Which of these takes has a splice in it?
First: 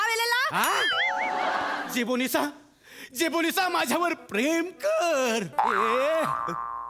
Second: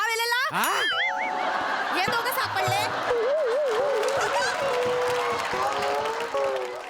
first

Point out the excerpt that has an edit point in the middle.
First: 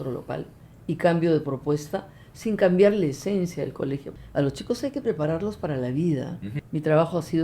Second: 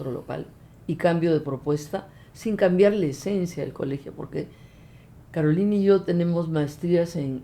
first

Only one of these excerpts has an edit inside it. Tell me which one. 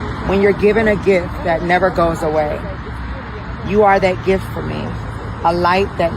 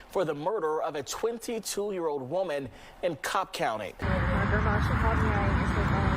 second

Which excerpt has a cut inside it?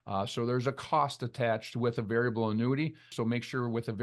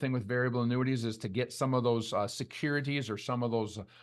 first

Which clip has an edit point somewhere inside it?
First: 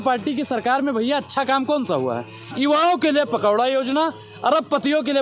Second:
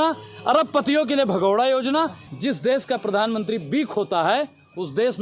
second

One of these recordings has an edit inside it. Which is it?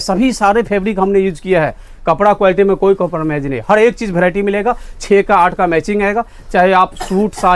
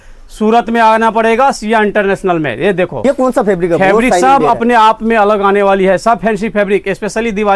second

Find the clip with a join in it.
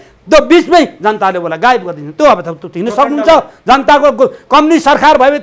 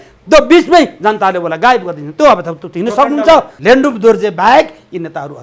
second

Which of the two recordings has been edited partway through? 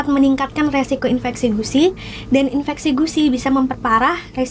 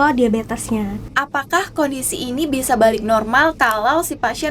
second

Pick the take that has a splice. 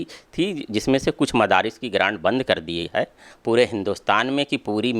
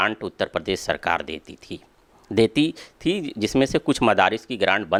first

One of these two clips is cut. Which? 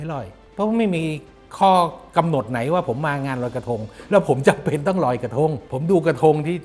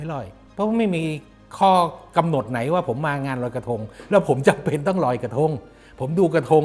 first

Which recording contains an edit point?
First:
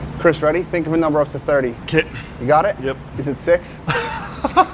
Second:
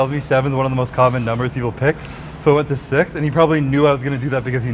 first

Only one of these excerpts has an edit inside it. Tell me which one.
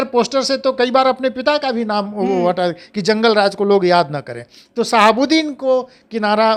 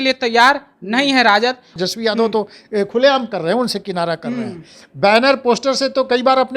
second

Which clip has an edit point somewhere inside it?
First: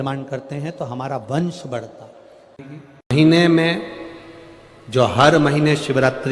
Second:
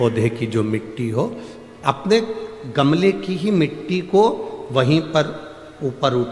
first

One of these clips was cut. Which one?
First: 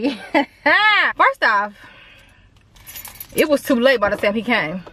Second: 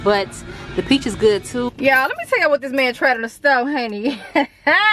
second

